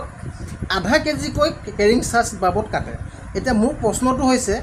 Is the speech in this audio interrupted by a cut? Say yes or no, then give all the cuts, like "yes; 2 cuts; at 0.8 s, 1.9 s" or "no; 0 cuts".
no; 0 cuts